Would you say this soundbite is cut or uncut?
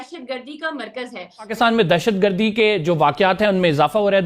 cut